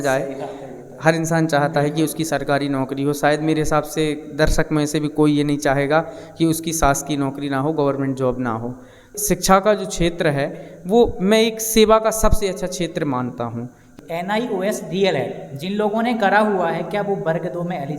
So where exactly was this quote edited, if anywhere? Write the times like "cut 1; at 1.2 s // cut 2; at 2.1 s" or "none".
cut 1; at 9.1 s // cut 2; at 13.8 s